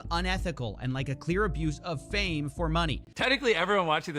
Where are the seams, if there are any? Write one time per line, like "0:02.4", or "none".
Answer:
0:03.0